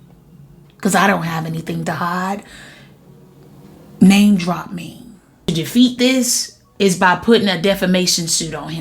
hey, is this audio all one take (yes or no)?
no